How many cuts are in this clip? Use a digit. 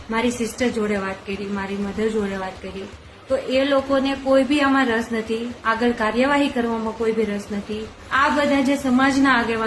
1